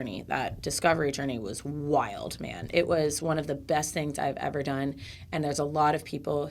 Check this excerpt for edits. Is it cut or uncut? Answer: uncut